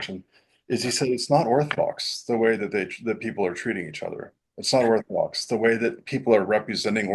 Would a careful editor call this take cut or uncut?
uncut